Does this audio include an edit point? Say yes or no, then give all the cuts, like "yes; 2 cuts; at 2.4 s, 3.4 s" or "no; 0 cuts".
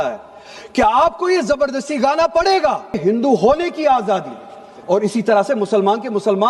yes; 1 cut; at 3.0 s